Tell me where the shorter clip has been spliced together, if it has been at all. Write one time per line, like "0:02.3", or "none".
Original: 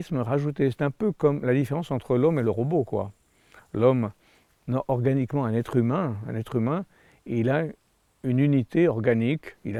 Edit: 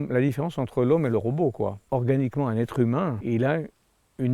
0:01.9
0:03.2